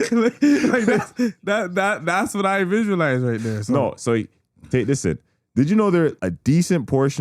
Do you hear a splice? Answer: yes; 1 cut; at 6.2 s

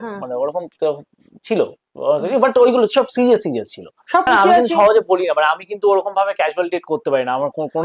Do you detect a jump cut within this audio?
yes; 1 cut; at 4.3 s

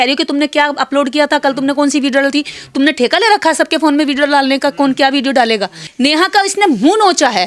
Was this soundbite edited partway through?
yes; 1 cut; at 5.8 s

